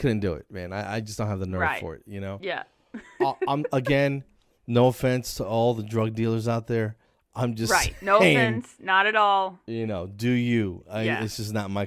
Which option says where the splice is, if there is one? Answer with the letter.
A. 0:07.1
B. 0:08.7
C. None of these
C